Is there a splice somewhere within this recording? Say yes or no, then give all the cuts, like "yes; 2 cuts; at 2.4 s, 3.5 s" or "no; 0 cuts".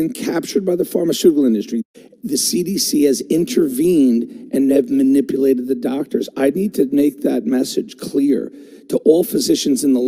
no; 0 cuts